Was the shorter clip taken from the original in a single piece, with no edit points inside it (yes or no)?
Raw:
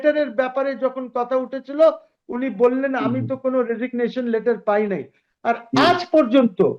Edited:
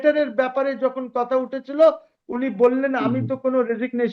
yes